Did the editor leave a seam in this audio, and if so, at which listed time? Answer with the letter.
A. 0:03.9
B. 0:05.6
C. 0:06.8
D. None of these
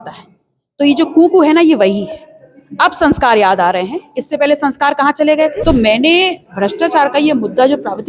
B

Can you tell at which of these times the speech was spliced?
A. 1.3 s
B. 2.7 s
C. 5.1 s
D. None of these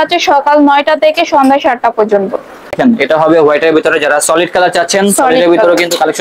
B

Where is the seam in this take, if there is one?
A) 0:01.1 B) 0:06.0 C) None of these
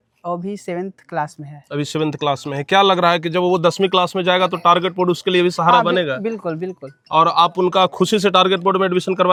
C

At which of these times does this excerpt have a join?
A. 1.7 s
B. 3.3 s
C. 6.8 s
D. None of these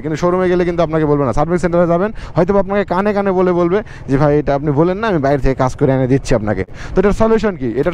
C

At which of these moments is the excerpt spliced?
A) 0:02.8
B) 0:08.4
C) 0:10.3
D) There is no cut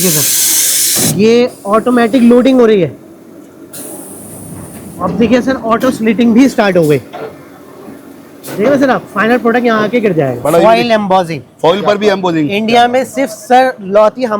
C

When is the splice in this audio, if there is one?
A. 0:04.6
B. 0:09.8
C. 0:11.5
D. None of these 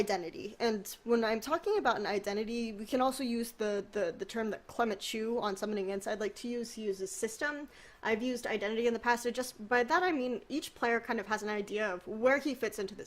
B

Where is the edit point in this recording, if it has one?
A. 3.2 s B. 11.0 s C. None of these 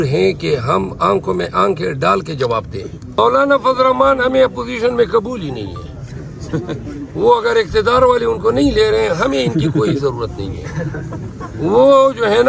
A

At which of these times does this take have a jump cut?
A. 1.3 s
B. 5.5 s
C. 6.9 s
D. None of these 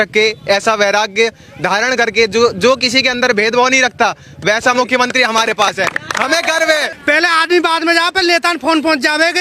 C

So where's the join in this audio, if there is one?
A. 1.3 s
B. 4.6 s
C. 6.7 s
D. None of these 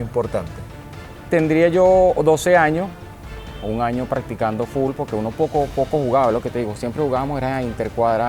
A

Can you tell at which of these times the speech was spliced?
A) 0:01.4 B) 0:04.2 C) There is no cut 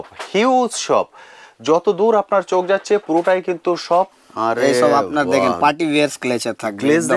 B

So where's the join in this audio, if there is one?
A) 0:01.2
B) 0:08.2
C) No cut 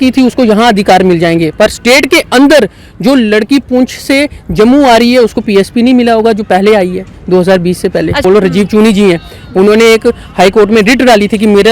B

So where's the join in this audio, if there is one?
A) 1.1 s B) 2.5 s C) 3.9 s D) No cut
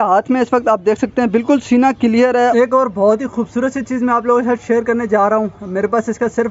B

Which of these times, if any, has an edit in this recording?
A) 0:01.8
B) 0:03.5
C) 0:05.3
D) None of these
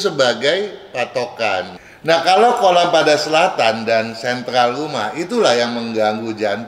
A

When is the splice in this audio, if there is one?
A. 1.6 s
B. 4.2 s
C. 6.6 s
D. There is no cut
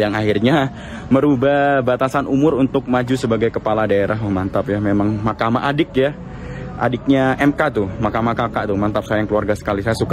D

